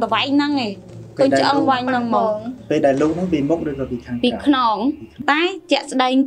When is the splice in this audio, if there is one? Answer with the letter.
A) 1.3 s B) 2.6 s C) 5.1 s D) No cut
C